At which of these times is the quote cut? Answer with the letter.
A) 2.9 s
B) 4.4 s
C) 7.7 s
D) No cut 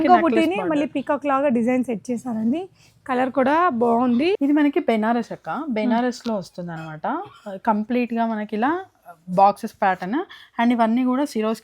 B